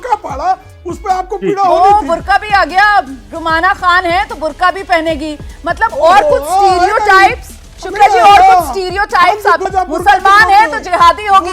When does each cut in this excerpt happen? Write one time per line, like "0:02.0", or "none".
0:09.7